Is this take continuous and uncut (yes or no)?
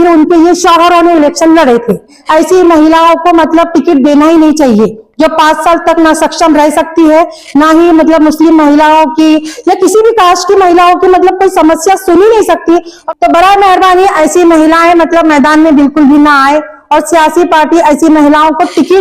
no